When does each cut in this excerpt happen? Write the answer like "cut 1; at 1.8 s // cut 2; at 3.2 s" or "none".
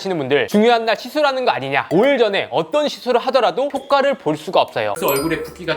cut 1; at 1.9 s // cut 2; at 5.0 s